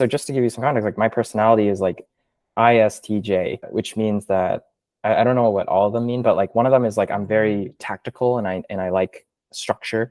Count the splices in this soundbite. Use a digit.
1